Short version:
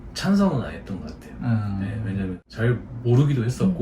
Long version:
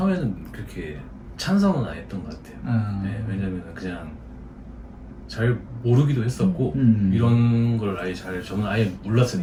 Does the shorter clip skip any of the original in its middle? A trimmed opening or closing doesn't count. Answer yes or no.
yes